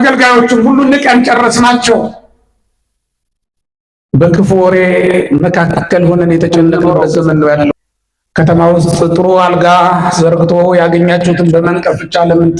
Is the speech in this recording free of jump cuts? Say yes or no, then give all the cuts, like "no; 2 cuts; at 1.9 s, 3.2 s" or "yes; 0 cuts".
no; 1 cut; at 7.7 s